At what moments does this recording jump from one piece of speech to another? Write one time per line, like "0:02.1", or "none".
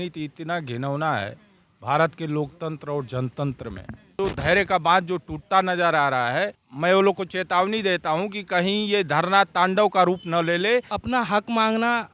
0:04.1
0:06.6
0:10.9